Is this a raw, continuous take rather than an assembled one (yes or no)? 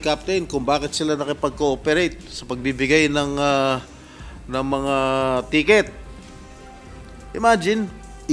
no